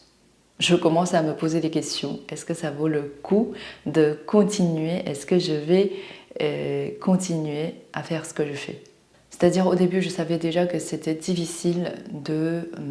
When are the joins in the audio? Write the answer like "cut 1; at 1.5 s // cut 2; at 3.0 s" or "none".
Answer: none